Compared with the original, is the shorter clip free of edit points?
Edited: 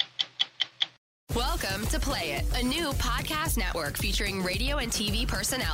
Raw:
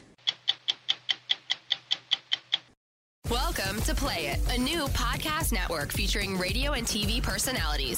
no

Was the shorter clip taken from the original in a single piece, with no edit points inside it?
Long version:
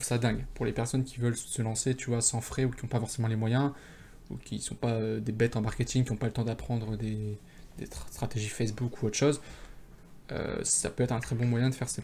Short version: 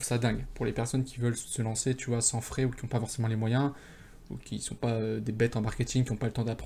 yes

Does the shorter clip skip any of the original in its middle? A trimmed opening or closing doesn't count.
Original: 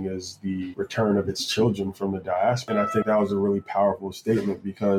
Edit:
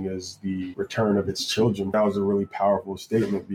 yes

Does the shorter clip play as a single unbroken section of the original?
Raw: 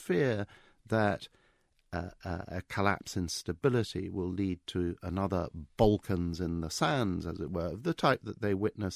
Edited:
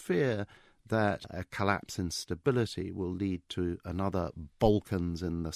no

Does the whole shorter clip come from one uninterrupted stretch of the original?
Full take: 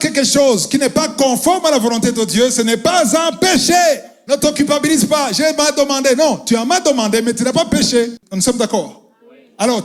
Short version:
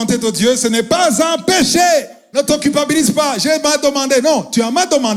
yes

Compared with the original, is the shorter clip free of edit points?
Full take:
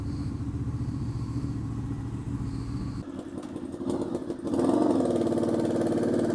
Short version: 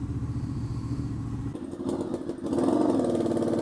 no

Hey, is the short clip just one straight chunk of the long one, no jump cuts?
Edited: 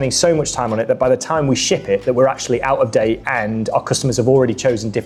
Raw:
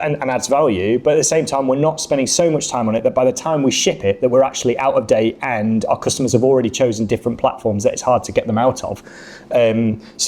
yes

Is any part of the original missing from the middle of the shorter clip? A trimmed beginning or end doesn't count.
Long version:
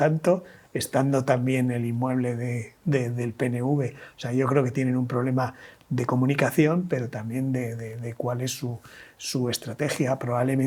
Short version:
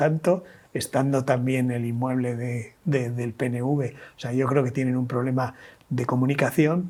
no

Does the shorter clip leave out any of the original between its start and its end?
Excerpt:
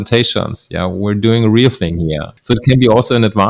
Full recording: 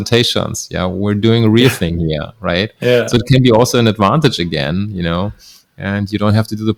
yes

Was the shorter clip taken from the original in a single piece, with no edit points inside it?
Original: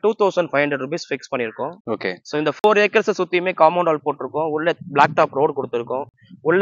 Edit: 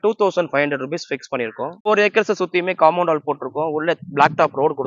no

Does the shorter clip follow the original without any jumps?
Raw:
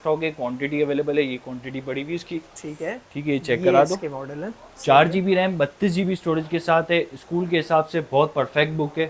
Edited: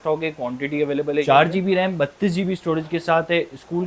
no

